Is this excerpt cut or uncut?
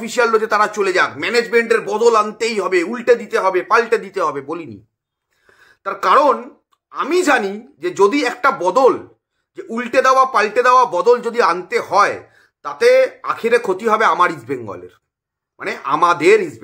uncut